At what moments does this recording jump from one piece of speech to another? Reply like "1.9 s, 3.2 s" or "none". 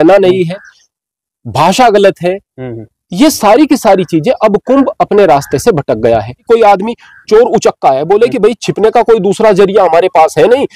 6.4 s